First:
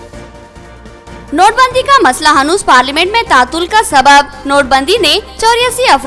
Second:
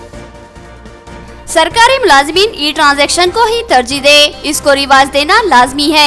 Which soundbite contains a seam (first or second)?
second